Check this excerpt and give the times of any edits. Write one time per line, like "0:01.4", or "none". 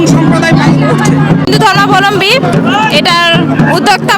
0:01.4